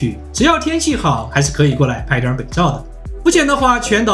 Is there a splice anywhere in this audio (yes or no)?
yes